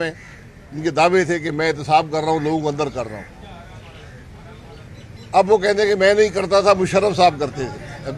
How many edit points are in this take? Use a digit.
0